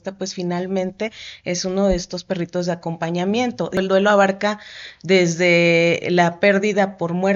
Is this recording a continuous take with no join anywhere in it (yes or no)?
no